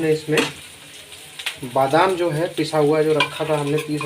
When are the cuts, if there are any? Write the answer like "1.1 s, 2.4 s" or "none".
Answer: none